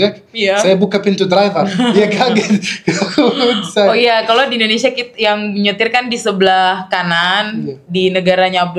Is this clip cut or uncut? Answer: uncut